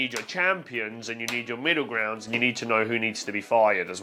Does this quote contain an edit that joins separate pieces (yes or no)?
no